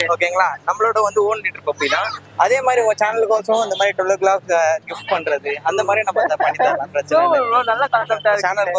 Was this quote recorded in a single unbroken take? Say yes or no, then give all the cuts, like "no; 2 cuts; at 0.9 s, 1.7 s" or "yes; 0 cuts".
no; 1 cut; at 2.1 s